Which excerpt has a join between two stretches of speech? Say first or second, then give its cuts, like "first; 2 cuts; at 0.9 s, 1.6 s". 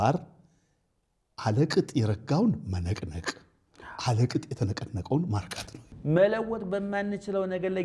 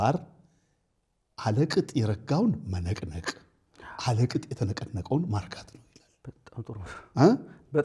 first; 1 cut; at 5.9 s